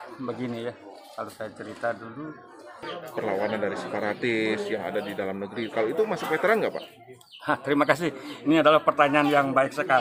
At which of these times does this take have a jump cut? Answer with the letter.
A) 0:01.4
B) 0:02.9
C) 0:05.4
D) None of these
B